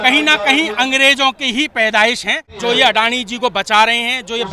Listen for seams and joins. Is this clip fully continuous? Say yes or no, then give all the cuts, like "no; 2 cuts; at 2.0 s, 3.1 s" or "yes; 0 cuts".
no; 1 cut; at 2.5 s